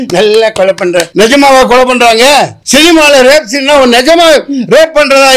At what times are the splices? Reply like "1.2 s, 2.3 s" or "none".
1.1 s, 2.6 s